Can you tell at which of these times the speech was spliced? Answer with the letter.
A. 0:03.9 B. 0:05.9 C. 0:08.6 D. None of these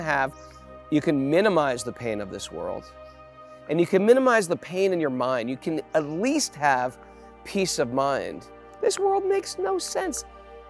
C